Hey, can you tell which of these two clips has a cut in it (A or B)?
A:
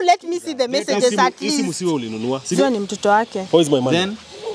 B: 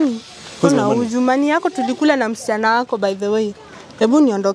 A